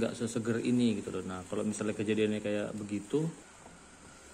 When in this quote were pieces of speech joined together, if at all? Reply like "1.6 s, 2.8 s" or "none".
3.4 s